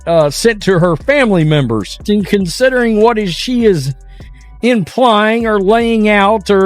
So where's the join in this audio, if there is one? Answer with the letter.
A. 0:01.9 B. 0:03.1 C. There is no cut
A